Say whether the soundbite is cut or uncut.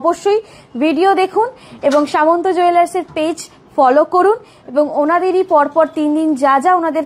uncut